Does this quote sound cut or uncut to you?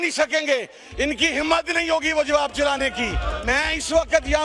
cut